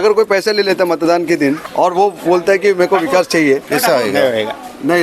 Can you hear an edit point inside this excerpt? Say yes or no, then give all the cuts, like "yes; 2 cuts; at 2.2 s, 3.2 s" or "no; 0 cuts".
yes; 2 cuts; at 1.6 s, 3.6 s